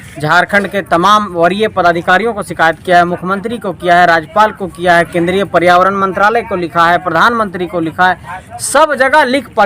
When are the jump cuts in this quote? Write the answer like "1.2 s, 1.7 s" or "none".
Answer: none